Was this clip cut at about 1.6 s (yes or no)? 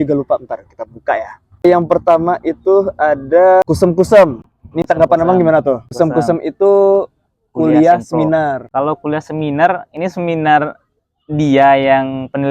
yes